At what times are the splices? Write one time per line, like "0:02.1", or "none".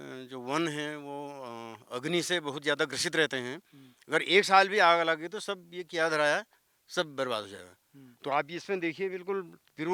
none